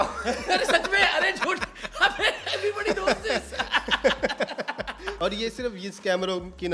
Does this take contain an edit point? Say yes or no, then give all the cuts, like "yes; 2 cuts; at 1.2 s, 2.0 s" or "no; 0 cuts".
yes; 1 cut; at 5.2 s